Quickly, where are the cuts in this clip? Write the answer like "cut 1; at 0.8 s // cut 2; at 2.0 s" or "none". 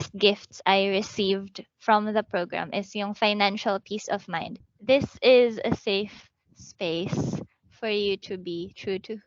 cut 1; at 4.6 s